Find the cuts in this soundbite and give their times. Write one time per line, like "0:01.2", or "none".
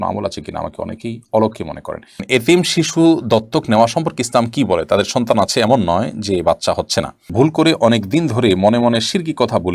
0:02.2
0:07.3